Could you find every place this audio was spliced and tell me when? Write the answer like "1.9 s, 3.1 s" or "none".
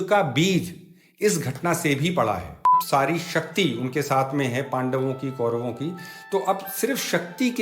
2.7 s